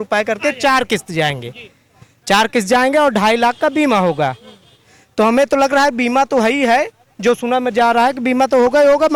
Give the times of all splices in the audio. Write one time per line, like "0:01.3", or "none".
none